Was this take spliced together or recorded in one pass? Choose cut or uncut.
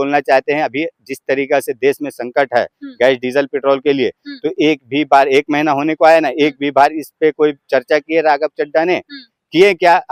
uncut